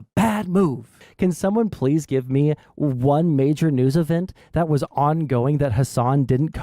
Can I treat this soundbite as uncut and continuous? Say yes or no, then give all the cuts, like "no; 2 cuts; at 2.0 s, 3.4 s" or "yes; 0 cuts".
no; 1 cut; at 1.0 s